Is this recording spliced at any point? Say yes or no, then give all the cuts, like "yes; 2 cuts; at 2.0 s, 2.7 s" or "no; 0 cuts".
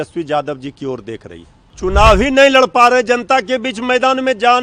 yes; 1 cut; at 1.7 s